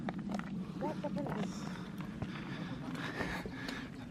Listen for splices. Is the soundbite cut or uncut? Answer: uncut